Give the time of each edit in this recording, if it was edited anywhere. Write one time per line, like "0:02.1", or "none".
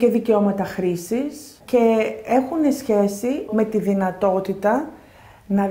0:01.5
0:03.5

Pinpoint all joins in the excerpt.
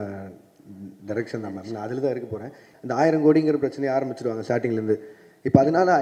0:02.6

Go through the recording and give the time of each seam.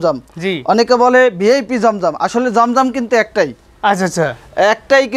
none

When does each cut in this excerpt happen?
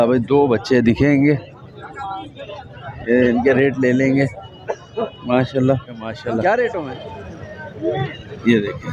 0:06.9

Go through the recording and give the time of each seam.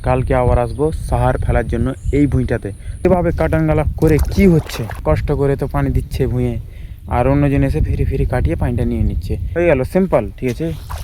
0:03.1
0:05.0
0:09.5

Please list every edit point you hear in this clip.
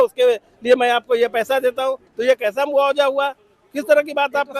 none

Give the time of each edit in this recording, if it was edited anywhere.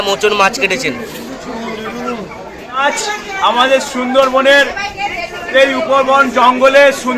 0:02.8

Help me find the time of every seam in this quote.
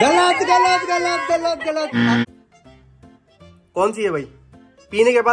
0:02.2

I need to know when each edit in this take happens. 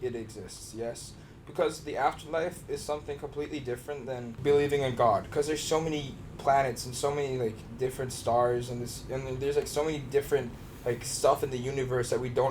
0:04.3

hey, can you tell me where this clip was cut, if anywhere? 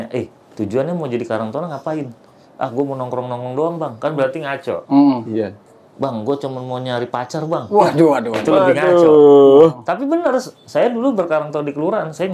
none

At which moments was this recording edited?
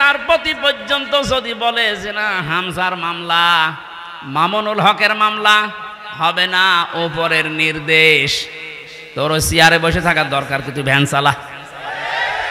none

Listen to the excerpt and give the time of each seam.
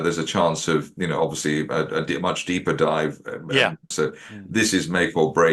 0:00.9
0:03.8

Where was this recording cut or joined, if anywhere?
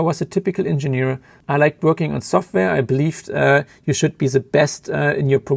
0:01.3

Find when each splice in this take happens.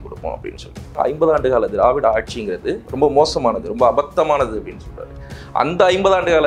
0:00.9
0:02.8

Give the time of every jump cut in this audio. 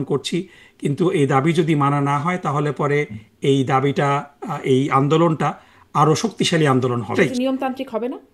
0:07.1

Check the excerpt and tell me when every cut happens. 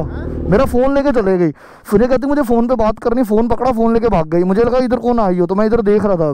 none

